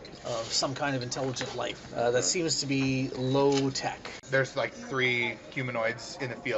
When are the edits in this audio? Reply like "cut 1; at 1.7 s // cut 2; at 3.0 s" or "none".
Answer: cut 1; at 4.2 s